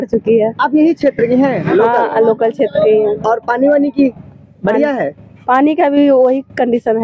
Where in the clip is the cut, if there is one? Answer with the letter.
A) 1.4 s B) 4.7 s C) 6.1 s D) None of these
D